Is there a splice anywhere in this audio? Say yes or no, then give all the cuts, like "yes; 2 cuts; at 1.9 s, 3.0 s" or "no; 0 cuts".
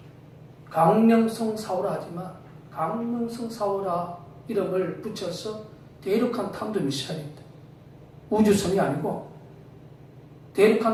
no; 0 cuts